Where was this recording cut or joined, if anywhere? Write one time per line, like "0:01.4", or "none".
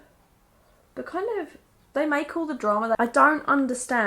0:03.0